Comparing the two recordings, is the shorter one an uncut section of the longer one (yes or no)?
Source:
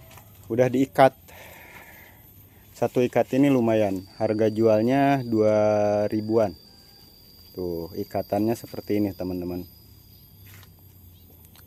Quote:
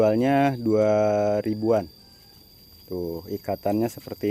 yes